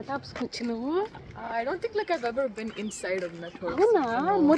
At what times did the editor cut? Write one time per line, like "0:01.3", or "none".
none